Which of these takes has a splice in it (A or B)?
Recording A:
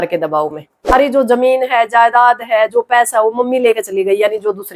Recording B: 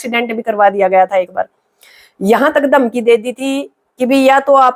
A